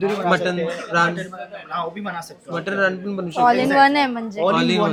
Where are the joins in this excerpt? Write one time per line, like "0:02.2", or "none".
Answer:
none